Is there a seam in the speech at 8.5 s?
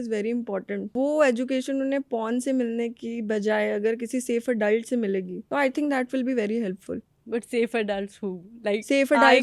no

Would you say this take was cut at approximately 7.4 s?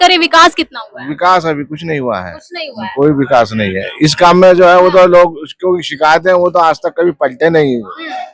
no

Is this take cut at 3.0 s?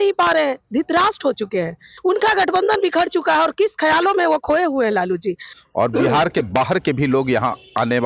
no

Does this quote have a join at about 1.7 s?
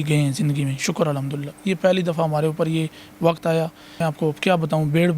no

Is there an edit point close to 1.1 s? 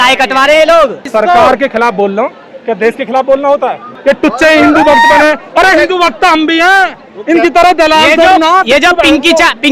yes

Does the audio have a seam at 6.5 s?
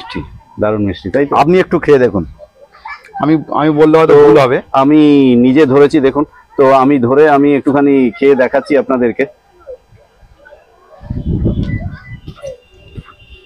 no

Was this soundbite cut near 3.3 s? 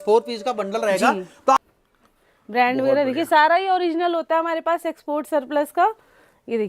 no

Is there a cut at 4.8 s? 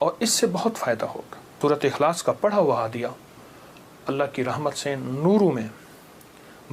no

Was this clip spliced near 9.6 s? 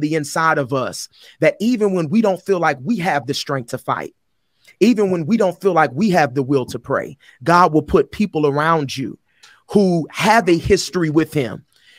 no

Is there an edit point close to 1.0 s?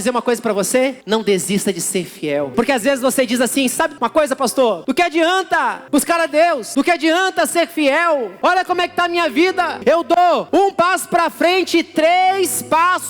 yes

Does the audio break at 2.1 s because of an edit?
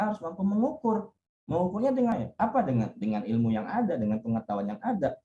yes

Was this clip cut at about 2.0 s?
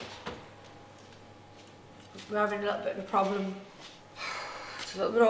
yes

